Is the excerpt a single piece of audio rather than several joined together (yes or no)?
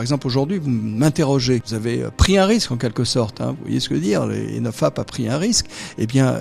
no